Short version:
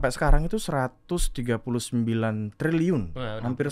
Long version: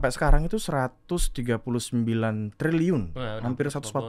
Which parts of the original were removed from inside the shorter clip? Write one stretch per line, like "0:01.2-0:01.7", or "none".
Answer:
none